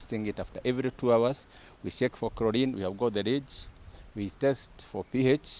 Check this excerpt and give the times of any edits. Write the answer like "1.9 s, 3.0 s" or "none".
none